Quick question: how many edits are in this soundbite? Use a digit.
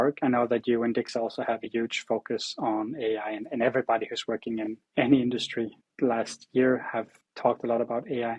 3